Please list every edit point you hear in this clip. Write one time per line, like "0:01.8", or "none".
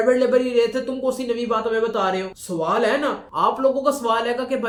none